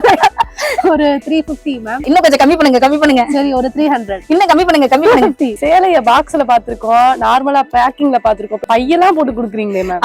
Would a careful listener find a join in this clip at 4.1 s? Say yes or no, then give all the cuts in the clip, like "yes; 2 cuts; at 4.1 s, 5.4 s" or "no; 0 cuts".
yes; 4 cuts; at 2.1 s, 4.1 s, 5.6 s, 8.6 s